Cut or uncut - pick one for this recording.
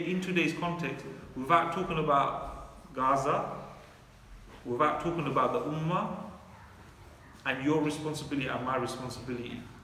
uncut